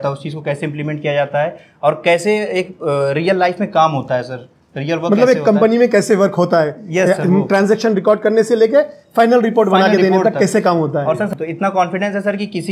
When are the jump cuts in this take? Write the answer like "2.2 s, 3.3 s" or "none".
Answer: 11.3 s